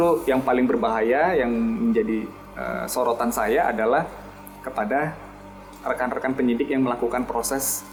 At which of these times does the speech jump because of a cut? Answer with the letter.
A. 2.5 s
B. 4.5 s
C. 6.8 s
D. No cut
D